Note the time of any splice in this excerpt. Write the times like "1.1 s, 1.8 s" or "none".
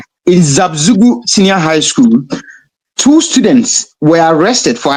none